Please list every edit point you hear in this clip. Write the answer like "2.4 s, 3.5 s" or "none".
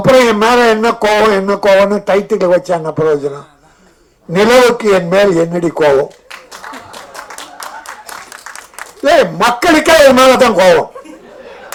none